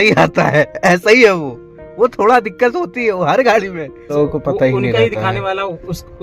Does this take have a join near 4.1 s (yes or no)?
yes